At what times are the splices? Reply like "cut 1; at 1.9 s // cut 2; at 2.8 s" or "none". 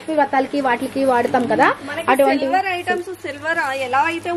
none